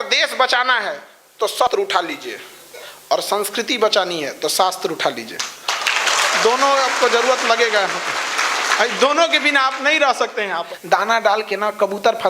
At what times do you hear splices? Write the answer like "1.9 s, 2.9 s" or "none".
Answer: 1.7 s, 10.7 s